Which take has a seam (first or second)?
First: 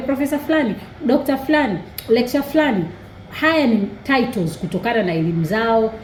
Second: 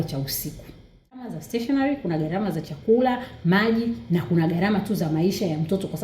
second